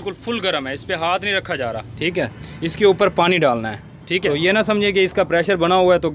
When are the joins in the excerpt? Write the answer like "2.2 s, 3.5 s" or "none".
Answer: 1.9 s, 4.2 s

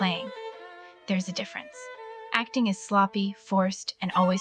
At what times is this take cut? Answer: none

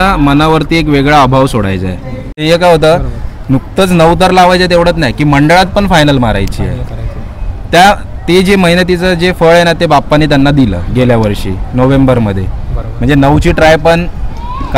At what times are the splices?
2.4 s

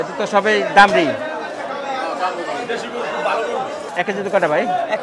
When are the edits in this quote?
3.9 s

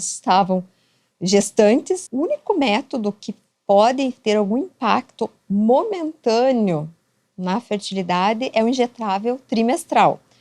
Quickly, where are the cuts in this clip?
2.0 s

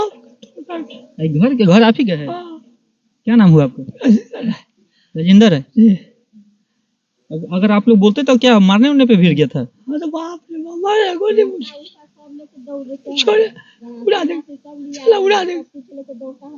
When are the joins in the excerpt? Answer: none

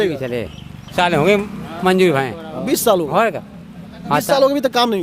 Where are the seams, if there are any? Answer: 0.9 s

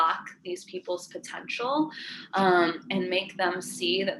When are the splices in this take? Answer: none

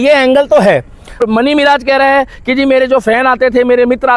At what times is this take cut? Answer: 1.2 s

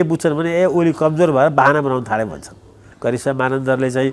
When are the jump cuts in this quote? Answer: 2.8 s

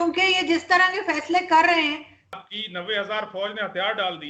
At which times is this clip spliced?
2.2 s

